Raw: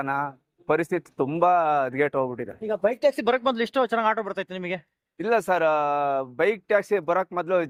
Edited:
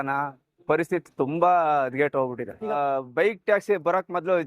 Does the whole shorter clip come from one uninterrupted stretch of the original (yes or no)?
no